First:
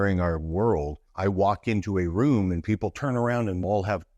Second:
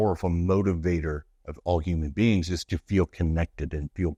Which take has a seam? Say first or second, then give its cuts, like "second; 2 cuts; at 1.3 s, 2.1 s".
first; 1 cut; at 1.1 s